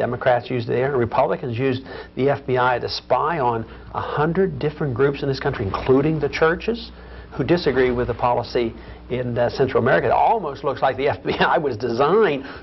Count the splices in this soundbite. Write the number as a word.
zero